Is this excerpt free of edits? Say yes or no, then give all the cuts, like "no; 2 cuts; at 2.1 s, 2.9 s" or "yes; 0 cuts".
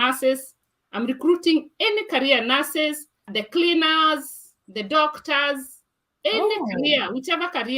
no; 1 cut; at 3.3 s